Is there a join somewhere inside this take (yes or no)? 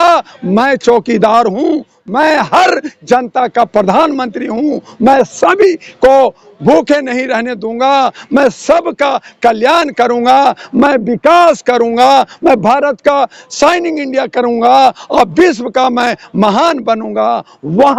no